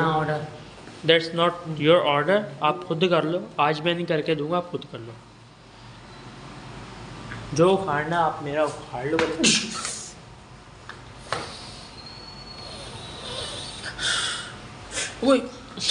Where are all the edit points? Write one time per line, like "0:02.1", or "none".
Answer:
none